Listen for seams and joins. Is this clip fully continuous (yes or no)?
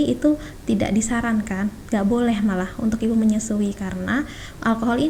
yes